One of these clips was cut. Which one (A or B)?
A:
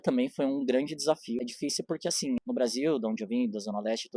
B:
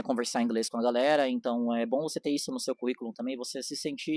A